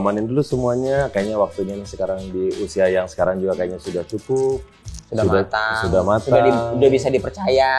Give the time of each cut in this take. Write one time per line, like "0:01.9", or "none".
none